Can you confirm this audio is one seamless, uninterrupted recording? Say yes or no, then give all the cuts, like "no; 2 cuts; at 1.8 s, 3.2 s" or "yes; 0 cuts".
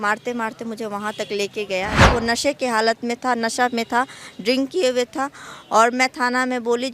no; 1 cut; at 2.0 s